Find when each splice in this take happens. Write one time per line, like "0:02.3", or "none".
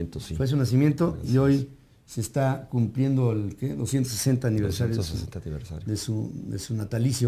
0:02.6